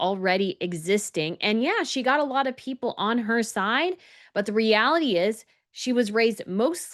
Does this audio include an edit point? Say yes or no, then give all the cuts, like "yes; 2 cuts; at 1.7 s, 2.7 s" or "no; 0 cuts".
no; 0 cuts